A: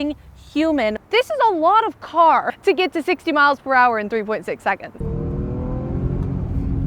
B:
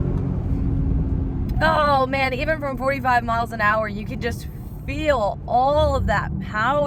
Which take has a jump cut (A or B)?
A